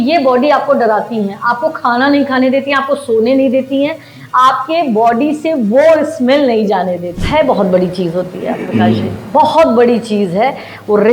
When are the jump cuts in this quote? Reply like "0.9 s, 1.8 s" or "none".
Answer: 7.1 s